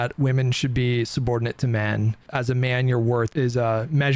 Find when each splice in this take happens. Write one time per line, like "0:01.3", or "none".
0:02.2
0:03.3